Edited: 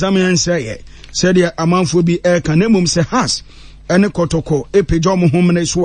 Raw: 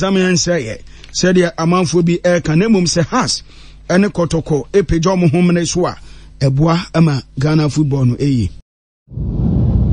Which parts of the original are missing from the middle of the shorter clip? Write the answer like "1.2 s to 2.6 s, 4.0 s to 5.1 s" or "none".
none